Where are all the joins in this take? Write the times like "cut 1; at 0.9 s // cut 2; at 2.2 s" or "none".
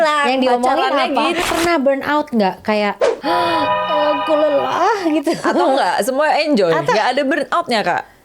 cut 1; at 1.4 s

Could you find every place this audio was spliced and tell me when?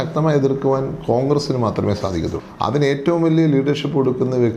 cut 1; at 2.4 s

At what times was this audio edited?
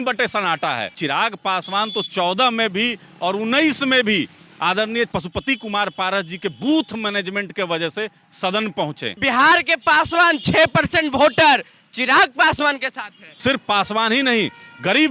cut 1; at 1.0 s // cut 2; at 5.1 s // cut 3; at 9.2 s // cut 4; at 13.2 s

